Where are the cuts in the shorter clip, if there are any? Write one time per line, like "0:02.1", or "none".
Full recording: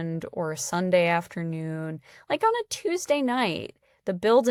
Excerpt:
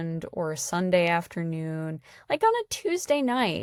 none